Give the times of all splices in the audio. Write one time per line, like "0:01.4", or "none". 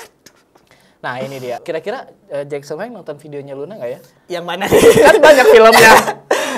0:01.6